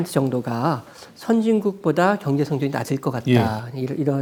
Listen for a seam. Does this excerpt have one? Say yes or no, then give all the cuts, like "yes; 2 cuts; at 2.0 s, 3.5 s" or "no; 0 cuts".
no; 0 cuts